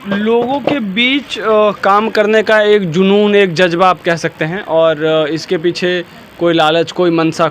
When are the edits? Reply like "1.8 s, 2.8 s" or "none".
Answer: none